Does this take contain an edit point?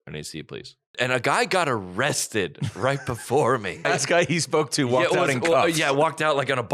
yes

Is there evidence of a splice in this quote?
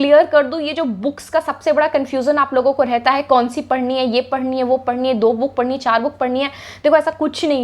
no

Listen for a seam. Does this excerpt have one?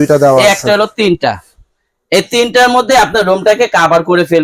no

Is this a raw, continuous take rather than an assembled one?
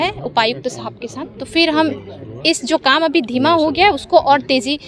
yes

